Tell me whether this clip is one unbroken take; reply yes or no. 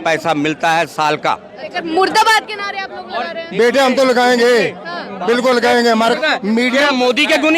no